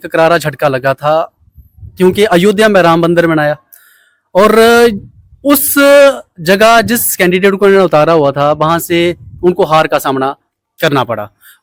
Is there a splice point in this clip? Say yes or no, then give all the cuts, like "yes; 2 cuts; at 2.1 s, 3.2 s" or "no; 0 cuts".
no; 0 cuts